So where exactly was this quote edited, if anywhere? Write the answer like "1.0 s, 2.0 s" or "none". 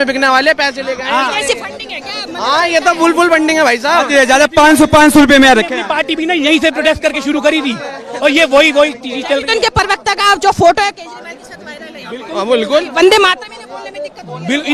none